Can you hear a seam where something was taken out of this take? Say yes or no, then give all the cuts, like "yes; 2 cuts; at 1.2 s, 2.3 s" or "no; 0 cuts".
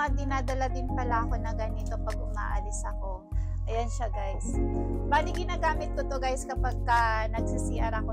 no; 0 cuts